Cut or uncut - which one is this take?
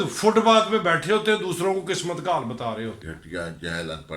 cut